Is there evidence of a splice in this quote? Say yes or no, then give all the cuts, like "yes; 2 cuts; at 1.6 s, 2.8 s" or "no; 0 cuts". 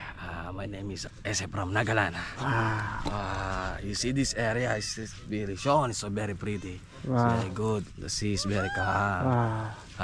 yes; 1 cut; at 1.0 s